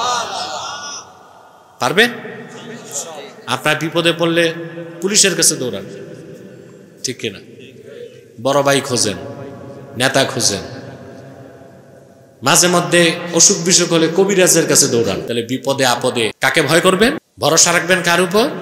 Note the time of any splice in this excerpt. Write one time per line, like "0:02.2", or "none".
0:15.2
0:16.4
0:17.3